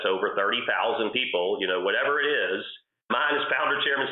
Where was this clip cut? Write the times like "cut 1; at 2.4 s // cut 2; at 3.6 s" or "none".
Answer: cut 1; at 3.1 s

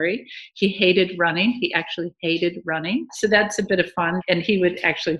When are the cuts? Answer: cut 1; at 3.1 s // cut 2; at 4.2 s

